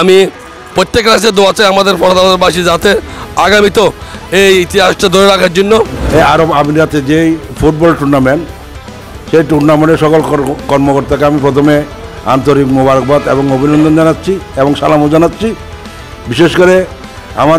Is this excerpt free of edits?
yes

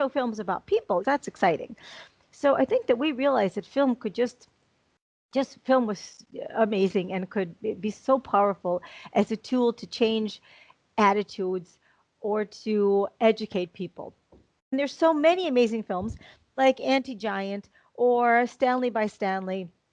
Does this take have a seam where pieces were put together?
yes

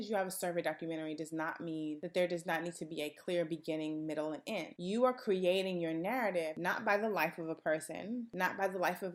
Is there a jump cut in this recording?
no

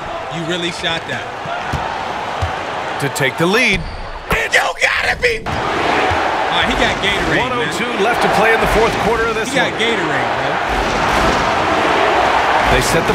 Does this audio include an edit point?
yes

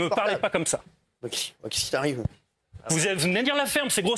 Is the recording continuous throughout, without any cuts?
no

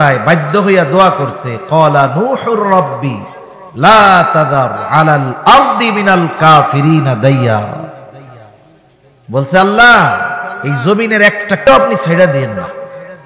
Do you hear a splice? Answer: yes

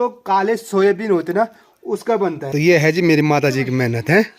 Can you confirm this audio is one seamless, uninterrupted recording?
no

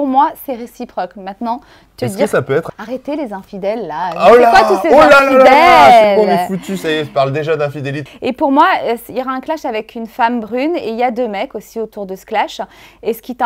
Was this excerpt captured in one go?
no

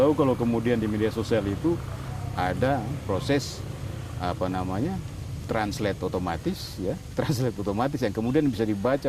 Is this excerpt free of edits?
yes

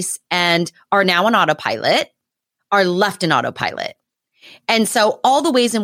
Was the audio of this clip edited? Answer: no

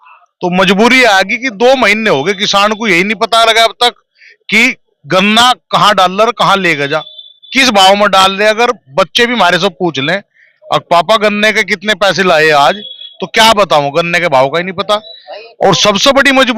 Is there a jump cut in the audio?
no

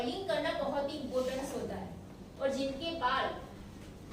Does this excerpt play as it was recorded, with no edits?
no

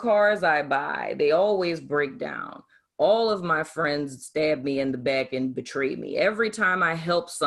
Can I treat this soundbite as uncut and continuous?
yes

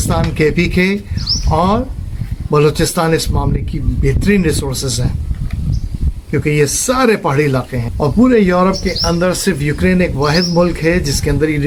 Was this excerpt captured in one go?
yes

